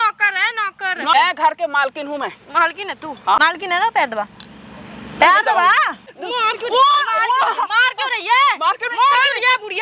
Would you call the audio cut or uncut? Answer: cut